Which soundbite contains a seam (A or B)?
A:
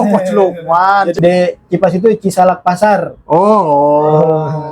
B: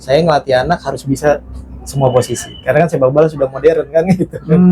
A